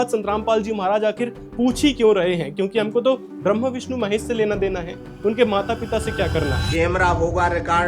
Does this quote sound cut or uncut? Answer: cut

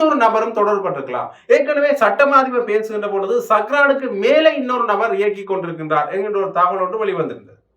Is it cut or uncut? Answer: uncut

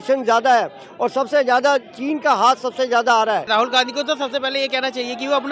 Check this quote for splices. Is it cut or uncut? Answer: cut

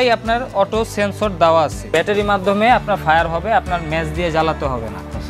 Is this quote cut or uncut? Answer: cut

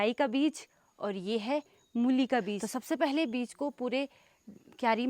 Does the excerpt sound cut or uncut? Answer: cut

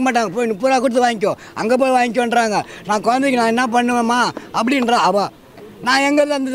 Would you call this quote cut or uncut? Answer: uncut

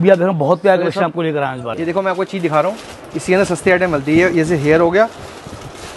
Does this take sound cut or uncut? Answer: cut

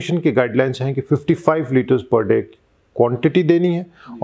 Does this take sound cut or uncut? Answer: uncut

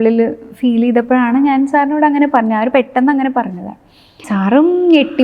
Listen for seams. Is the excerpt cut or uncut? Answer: cut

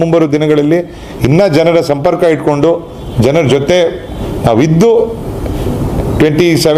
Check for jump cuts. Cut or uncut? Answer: uncut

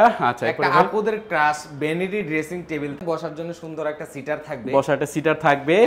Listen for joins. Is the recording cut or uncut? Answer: cut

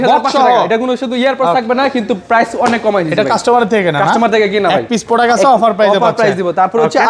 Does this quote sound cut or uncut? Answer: uncut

